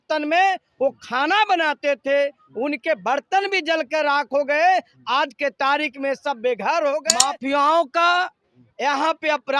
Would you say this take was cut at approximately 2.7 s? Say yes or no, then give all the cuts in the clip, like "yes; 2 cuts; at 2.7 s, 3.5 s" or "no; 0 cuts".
no; 1 cut; at 7.1 s